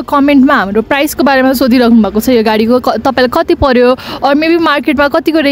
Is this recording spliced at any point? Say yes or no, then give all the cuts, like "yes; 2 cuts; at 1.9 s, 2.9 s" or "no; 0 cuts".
no; 0 cuts